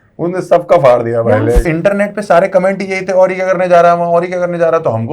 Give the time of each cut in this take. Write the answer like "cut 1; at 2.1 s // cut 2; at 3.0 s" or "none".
cut 1; at 1.6 s